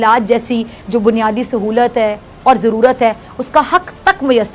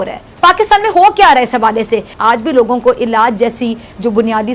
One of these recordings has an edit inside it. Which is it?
second; 1 cut; at 2.1 s

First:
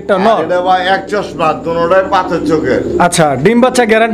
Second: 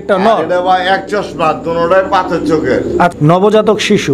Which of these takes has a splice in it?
second; 1 cut; at 3.1 s

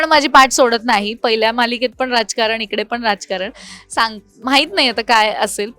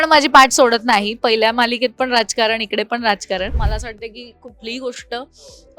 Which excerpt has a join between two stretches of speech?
second; 1 cut; at 3.6 s

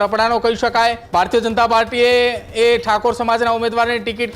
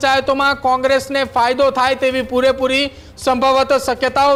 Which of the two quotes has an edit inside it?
first; 1 cut; at 1.0 s

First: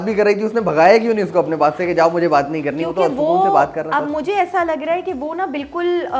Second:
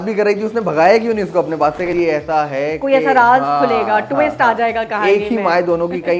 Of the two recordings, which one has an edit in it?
second; 1 cut; at 1.9 s

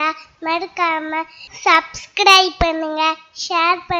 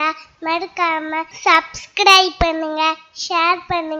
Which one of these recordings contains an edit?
second; 1 cut; at 1.3 s

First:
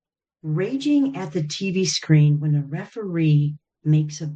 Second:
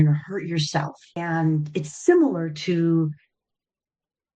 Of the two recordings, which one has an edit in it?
second; 1 cut; at 1.2 s

